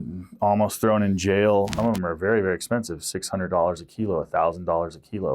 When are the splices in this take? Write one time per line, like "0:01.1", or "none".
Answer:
0:01.7